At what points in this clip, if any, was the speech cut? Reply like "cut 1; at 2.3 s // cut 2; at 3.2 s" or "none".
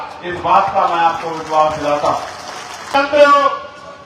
cut 1; at 2.9 s